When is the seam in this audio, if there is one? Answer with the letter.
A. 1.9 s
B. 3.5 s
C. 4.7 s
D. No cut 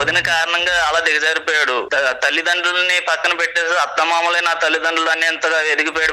A